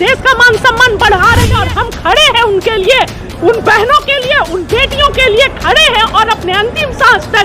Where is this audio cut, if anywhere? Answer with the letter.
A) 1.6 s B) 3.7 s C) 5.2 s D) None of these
A